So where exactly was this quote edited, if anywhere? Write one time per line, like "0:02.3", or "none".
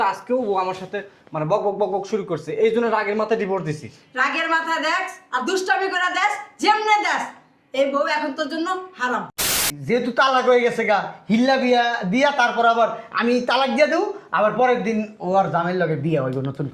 0:09.7

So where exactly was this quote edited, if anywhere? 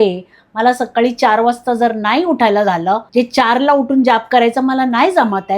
0:03.1

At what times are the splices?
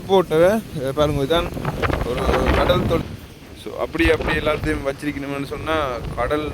0:03.0

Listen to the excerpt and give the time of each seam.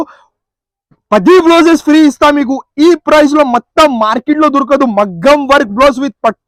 none

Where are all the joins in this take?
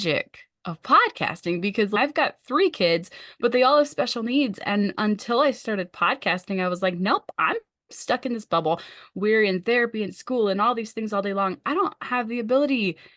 0:02.0

